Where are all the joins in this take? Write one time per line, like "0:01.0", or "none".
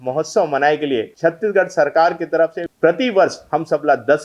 0:01.1
0:02.6